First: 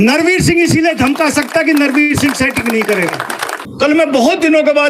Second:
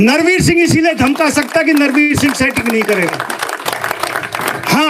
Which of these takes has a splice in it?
first; 1 cut; at 3.6 s

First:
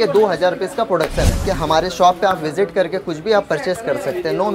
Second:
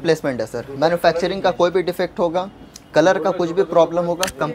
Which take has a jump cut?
first; 1 cut; at 1.4 s

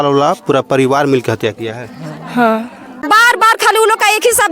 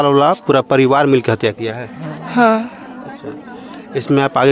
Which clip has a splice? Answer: first; 1 cut; at 3.0 s

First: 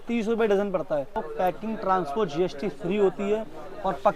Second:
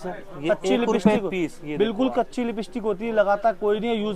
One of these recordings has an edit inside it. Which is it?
first; 1 cut; at 1.3 s

